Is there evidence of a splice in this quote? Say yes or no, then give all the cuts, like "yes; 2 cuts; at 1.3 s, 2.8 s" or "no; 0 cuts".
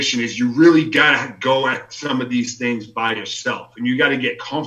no; 0 cuts